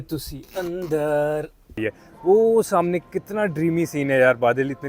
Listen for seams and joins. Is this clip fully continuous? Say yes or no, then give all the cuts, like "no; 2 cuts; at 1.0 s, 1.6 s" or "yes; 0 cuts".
no; 1 cut; at 1.7 s